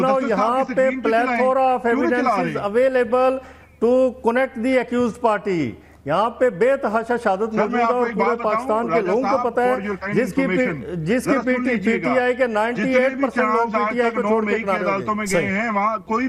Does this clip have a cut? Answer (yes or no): no